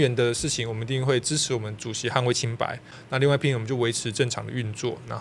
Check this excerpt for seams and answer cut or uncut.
cut